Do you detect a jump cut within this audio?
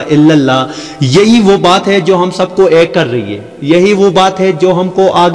no; 0 cuts

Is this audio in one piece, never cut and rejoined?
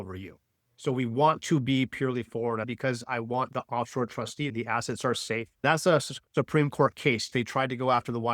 no; 4 cuts; at 2.7 s, 4.5 s, 5.6 s, 7.3 s

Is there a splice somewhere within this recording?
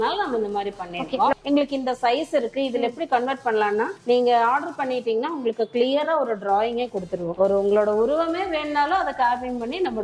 yes; 2 cuts; at 1.4 s, 7.4 s

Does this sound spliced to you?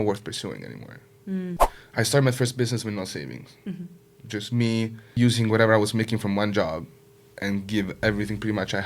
yes; 2 cuts; at 1.8 s, 5.0 s

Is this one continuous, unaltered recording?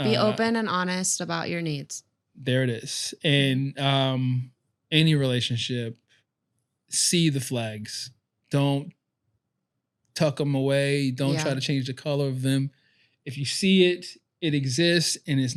yes; 0 cuts

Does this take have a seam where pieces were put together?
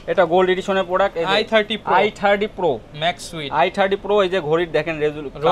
no; 0 cuts

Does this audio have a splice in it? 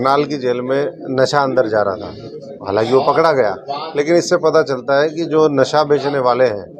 no; 0 cuts

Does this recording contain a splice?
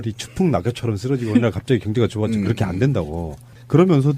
no; 0 cuts

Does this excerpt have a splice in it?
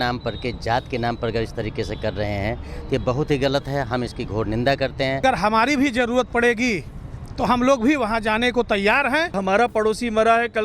yes; 2 cuts; at 5.2 s, 9.3 s

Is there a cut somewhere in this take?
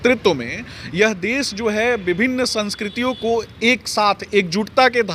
no; 0 cuts

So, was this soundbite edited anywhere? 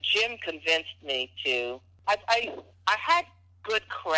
yes; 1 cut; at 1.9 s

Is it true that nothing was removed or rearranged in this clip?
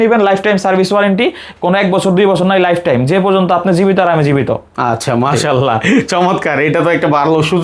yes; 0 cuts

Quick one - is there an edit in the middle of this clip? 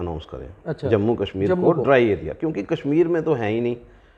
no; 0 cuts

